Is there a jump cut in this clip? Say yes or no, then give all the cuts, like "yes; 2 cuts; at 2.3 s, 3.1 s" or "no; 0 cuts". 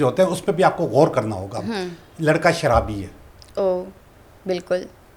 no; 0 cuts